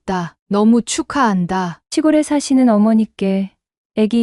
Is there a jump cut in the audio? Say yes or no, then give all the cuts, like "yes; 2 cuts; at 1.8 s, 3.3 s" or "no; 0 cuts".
yes; 1 cut; at 1.8 s